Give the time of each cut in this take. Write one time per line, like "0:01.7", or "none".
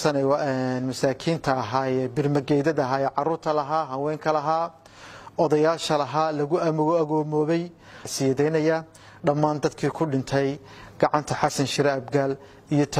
0:08.1